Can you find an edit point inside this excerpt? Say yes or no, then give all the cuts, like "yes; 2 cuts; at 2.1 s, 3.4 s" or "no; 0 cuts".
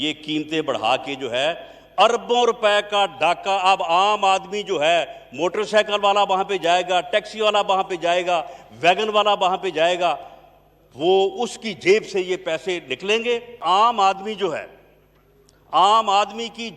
yes; 1 cut; at 13.6 s